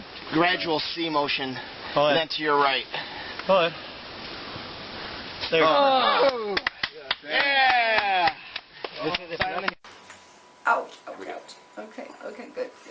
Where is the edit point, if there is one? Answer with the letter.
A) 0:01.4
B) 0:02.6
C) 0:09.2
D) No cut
B